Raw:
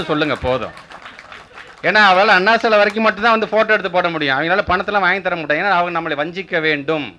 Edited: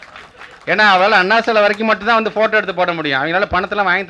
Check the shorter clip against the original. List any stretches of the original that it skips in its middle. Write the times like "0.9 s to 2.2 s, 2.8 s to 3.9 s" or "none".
none